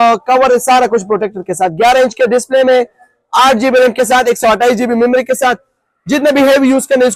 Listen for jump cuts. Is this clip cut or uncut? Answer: uncut